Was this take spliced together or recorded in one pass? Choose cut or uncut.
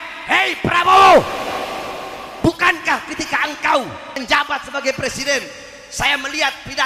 cut